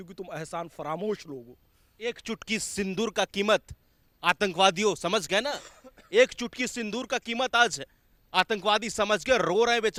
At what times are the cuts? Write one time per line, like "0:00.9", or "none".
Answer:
none

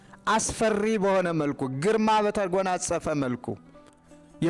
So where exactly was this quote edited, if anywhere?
none

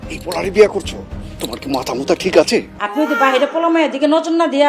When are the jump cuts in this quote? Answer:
0:02.8

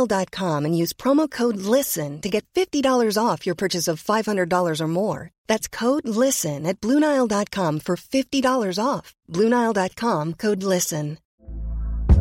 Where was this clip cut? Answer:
0:11.2

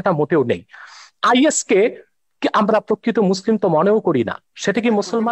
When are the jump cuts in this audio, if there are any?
none

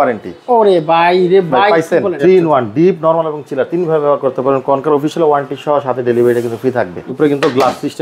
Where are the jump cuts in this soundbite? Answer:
0:02.2
0:07.0

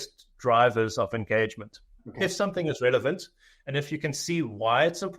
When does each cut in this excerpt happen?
0:02.0

